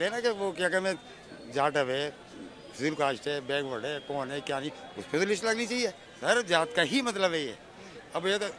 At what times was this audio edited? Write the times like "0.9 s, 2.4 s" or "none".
6.1 s